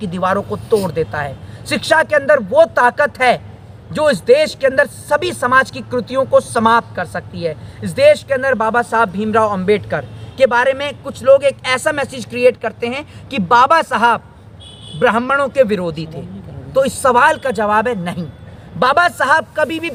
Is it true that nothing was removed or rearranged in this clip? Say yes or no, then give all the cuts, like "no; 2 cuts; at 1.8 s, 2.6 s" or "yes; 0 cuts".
yes; 0 cuts